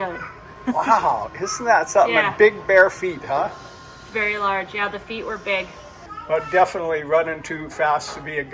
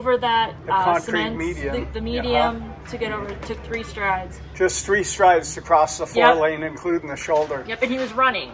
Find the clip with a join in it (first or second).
first